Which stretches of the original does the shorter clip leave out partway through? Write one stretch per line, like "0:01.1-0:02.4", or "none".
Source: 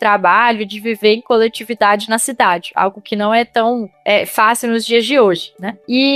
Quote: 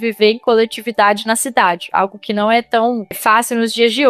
0:04.0-0:04.3